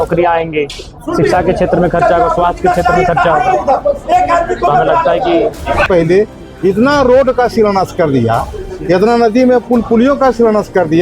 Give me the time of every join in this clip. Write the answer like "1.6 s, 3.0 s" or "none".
5.9 s